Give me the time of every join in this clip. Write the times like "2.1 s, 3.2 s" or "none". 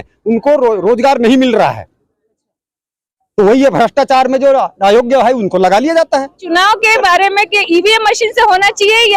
6.4 s